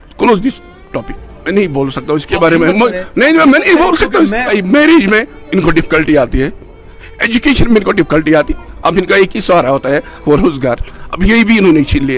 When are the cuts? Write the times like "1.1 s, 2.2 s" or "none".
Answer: 4.5 s